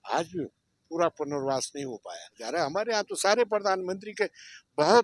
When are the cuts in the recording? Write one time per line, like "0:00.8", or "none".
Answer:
0:02.4